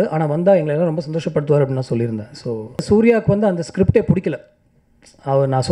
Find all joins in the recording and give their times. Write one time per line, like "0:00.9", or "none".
0:02.8